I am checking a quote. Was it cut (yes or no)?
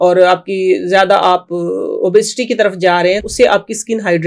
yes